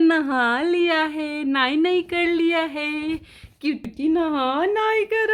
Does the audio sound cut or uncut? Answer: uncut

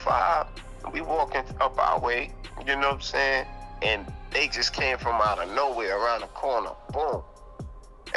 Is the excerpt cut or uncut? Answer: uncut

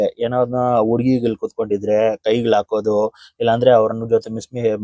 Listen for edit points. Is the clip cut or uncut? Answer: uncut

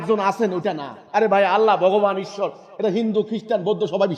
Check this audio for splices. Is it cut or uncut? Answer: uncut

